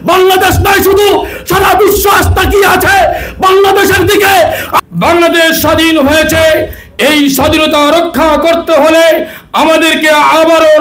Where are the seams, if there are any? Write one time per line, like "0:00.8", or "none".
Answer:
0:04.7